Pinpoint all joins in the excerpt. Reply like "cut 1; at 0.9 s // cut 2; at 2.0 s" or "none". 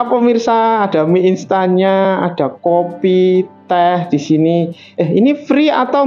none